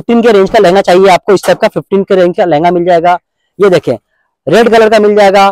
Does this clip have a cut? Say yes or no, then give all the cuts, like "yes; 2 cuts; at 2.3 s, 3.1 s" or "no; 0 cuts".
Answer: no; 0 cuts